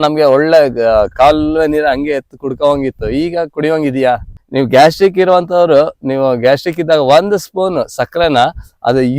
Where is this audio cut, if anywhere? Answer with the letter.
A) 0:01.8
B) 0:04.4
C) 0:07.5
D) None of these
B